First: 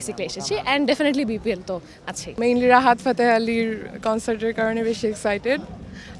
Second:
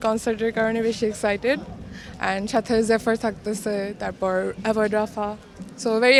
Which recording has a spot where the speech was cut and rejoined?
first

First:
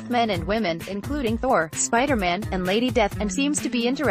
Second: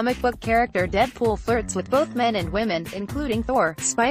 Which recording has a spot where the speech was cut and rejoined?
first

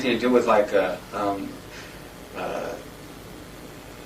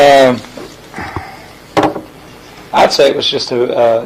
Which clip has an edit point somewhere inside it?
first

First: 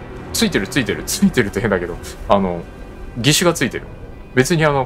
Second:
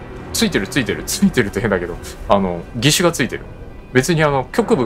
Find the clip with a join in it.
second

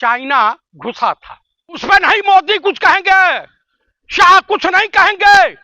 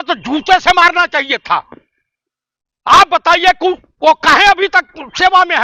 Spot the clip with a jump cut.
first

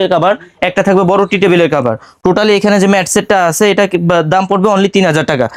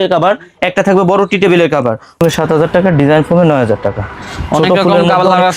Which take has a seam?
second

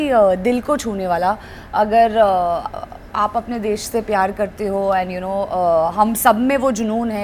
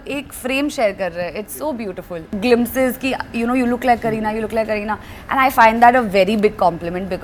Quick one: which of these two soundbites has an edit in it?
second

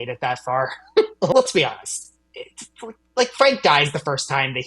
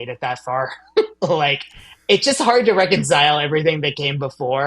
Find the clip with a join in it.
first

